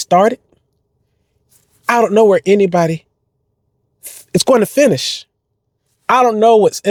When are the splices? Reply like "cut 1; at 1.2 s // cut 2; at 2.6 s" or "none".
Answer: none